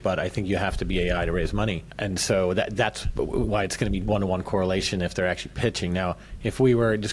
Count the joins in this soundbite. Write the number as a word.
one